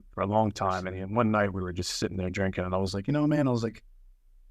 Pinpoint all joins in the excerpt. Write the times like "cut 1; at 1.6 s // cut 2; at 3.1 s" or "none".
cut 1; at 1.0 s

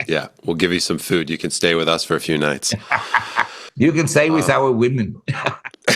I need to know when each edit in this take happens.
cut 1; at 3.6 s

